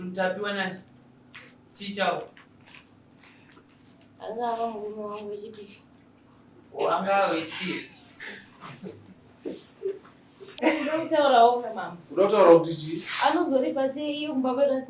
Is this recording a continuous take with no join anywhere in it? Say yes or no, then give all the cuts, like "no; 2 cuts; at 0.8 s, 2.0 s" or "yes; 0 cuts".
no; 1 cut; at 10.4 s